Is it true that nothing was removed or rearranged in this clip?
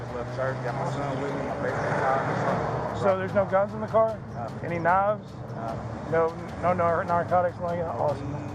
yes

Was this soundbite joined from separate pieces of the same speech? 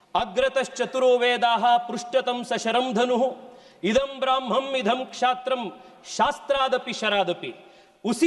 no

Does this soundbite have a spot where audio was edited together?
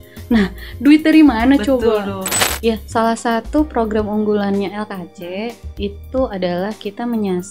yes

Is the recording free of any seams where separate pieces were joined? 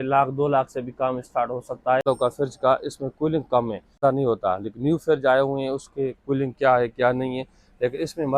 no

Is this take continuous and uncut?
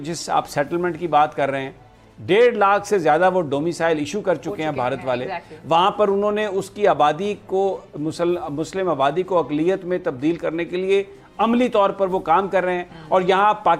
yes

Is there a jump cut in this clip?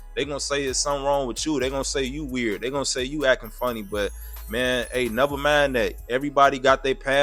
yes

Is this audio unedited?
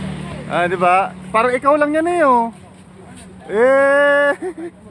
yes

